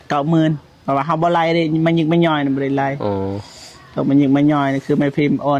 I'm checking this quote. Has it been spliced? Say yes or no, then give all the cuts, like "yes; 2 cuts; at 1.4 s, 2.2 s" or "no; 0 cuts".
no; 0 cuts